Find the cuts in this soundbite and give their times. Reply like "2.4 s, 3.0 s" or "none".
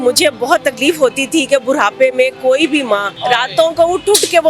3.1 s

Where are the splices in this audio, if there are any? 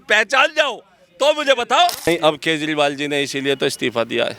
2.0 s

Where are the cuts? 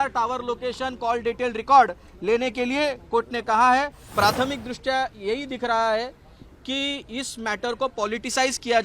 4.0 s

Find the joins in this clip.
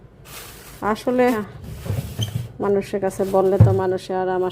1.4 s

